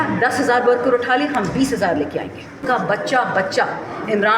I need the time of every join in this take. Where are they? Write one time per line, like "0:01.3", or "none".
0:02.6